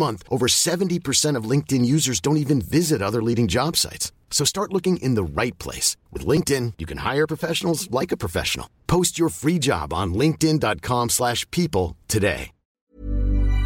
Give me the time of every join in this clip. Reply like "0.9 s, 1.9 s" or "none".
none